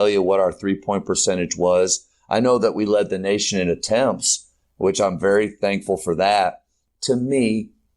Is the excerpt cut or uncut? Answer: cut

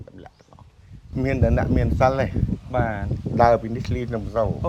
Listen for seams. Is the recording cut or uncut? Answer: cut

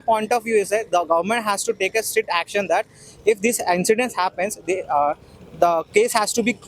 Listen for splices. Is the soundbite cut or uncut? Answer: uncut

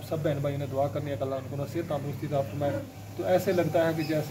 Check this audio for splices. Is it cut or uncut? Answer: cut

